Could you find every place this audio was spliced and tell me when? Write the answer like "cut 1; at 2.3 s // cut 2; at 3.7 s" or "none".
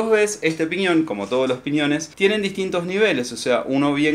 cut 1; at 2.1 s